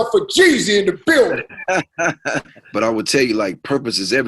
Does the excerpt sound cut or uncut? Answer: cut